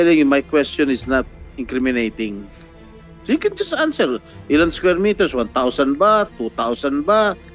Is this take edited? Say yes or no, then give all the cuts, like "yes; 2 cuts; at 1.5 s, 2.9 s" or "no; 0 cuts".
no; 0 cuts